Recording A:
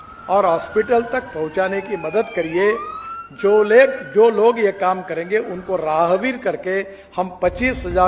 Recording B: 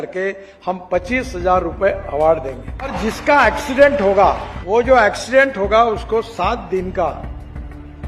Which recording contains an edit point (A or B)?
B